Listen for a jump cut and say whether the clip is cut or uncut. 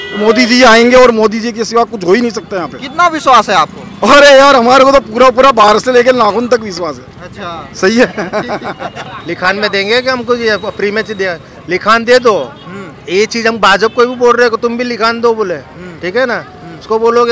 uncut